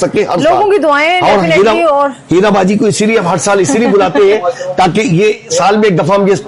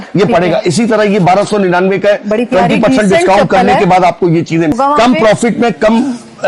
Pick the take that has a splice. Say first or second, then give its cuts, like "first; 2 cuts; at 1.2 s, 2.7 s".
second; 1 cut; at 4.7 s